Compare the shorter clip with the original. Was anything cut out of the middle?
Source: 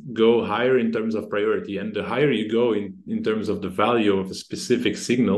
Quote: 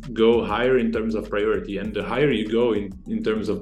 no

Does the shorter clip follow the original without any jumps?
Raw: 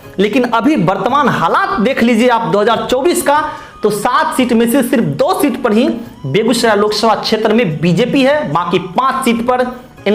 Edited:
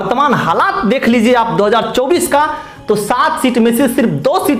yes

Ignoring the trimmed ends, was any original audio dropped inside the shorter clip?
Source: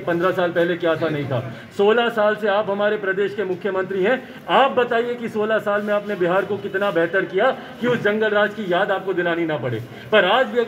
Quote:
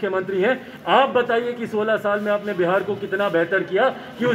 no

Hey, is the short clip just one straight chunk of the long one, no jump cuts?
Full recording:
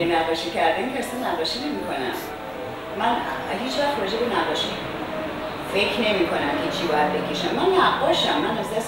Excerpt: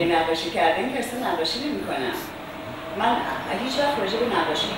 yes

